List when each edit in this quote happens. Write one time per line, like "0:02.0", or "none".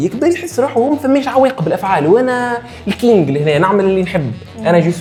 none